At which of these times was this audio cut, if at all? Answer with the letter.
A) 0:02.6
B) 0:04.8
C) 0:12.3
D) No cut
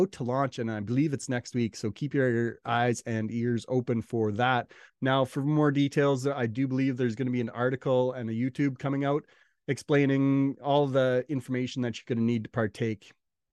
B